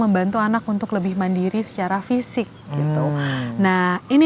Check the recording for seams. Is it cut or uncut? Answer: uncut